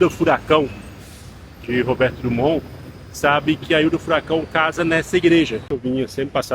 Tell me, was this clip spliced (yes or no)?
yes